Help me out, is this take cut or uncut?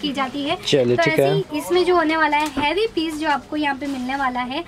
uncut